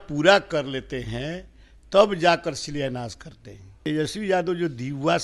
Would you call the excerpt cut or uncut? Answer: cut